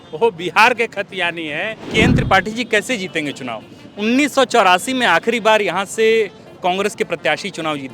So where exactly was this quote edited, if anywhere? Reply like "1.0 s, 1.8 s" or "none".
1.8 s